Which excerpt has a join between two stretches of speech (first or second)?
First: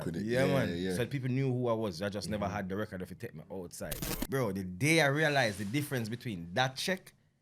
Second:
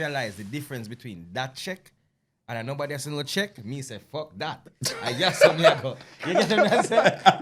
first